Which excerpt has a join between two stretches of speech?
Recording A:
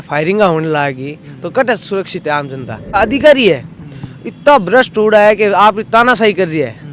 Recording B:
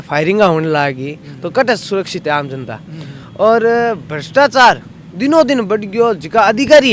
A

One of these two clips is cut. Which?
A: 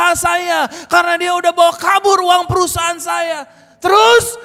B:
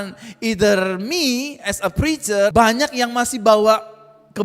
B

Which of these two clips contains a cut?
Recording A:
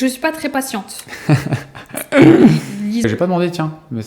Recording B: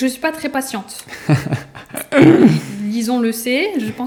A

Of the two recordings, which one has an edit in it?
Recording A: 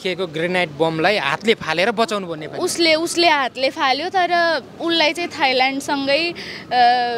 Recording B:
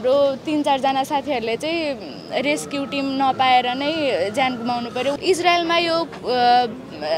B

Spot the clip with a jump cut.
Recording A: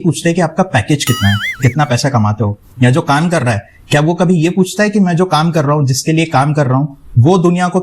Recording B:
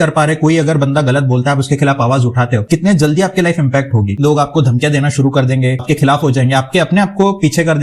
B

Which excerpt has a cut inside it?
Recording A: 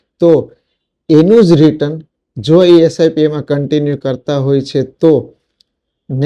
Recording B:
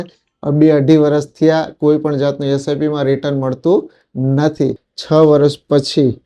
B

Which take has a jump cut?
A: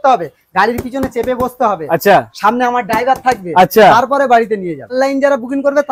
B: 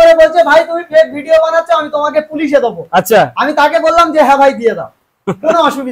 A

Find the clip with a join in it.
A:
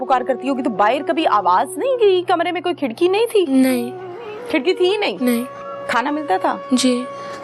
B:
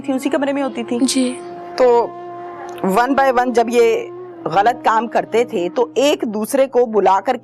B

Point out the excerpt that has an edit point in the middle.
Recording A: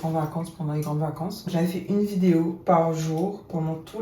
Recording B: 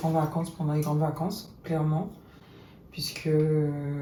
A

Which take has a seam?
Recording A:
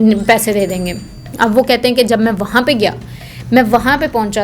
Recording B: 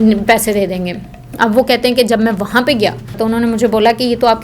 B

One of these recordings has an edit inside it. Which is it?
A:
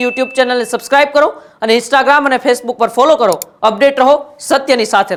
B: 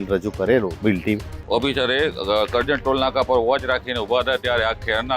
B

